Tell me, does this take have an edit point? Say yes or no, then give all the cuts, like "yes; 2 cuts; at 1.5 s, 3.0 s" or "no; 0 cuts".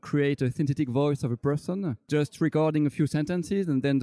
yes; 1 cut; at 2.0 s